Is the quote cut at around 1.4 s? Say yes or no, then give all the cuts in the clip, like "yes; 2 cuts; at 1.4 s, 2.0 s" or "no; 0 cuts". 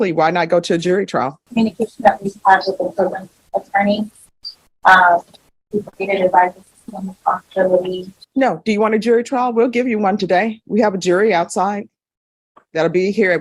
yes; 1 cut; at 1.4 s